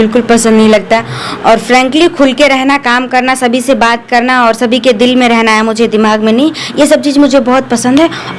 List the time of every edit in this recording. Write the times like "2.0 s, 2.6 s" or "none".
none

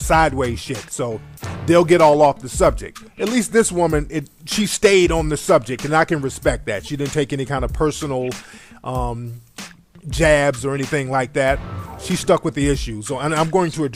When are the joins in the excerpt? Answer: none

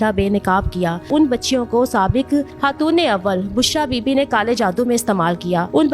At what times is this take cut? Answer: 1.1 s

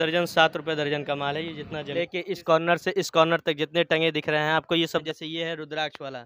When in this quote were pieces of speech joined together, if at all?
1.9 s, 5.0 s

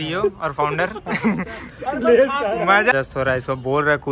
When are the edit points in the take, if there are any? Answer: 2.9 s

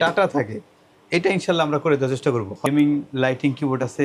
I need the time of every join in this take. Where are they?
2.7 s

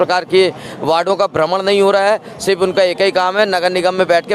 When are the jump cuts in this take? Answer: none

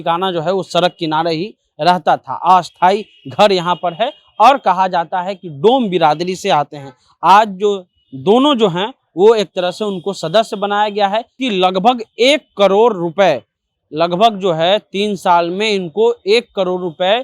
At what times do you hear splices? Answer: 11.4 s

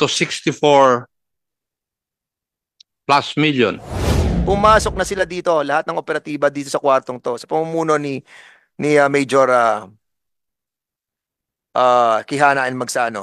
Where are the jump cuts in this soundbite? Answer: 4.2 s

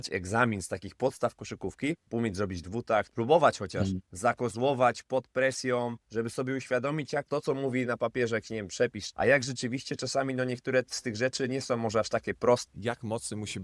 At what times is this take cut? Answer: 2.0 s, 3.1 s, 4.0 s, 6.0 s, 7.3 s, 9.0 s, 12.6 s

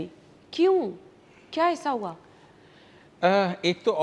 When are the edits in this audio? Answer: none

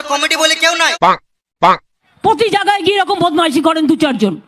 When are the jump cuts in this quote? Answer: 0.9 s

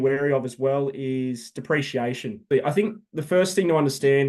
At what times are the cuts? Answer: 2.5 s

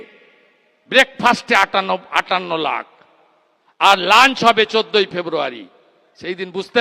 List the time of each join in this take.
none

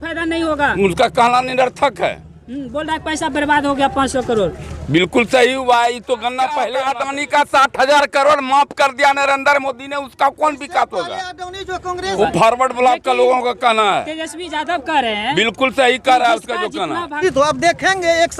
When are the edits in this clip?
6.8 s, 12.1 s, 17.2 s

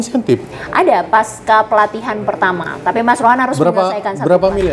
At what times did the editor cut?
none

